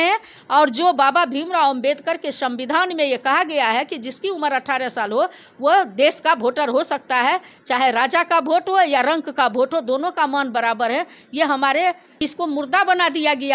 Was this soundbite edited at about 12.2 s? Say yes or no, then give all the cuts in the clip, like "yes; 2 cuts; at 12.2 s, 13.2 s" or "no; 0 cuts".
yes; 1 cut; at 12.2 s